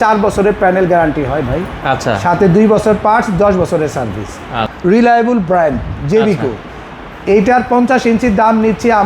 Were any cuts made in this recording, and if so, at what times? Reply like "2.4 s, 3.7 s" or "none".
4.7 s